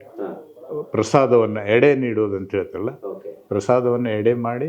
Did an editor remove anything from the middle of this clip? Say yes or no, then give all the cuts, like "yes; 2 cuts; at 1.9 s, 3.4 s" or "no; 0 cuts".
no; 0 cuts